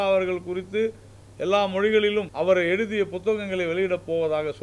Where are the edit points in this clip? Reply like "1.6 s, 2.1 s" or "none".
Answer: 2.3 s